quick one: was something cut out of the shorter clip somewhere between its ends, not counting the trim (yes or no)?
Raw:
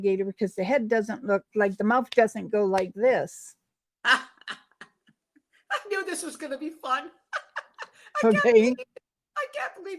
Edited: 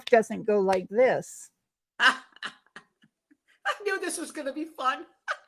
no